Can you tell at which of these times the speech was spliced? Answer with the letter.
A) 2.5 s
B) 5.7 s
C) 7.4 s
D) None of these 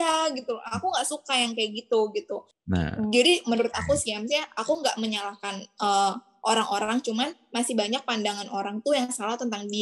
A